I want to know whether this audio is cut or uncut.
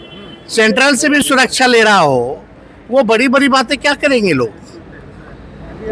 uncut